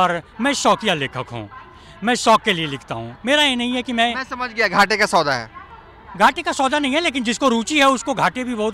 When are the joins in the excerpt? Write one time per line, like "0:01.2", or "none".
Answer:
none